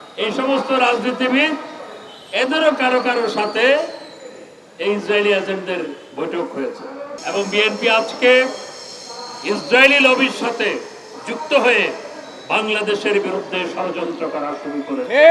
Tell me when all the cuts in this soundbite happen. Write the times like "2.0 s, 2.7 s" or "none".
7.1 s